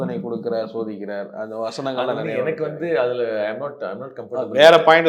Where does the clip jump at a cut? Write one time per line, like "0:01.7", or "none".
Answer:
none